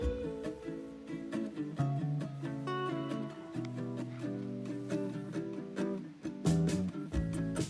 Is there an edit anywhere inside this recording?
no; 0 cuts

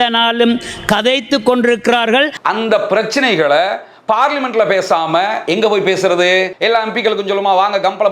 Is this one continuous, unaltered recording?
no; 2 cuts; at 2.3 s, 6.5 s

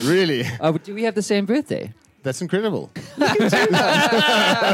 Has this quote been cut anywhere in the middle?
yes; 1 cut; at 3.0 s

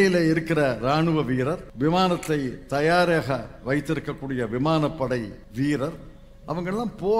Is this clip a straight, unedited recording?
no; 2 cuts; at 1.7 s, 5.4 s

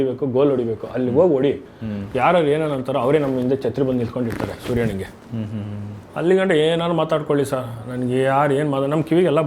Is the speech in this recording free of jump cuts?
yes; 0 cuts

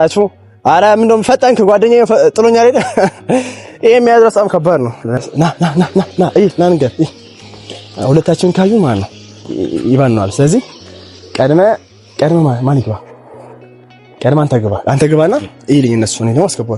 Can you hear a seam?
yes; 1 cut; at 5.2 s

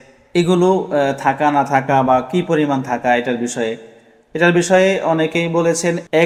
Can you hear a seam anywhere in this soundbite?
no; 0 cuts

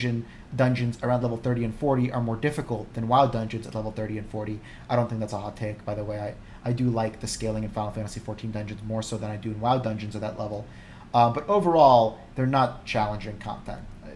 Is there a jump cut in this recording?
no; 0 cuts

